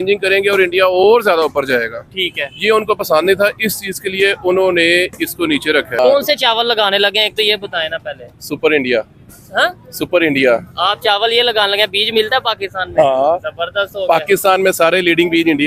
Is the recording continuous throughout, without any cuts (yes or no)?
no